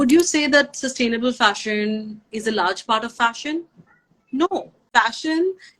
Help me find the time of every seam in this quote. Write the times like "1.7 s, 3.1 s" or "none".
4.8 s